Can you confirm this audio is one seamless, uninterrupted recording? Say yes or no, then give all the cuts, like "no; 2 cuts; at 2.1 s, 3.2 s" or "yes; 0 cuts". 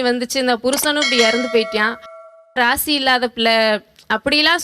no; 1 cut; at 2.4 s